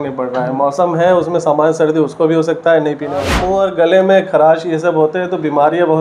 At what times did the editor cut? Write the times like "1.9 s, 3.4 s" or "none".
3.3 s